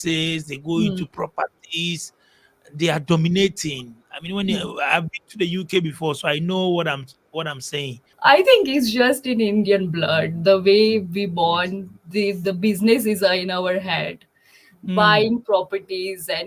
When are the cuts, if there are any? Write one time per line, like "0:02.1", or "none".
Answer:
0:08.0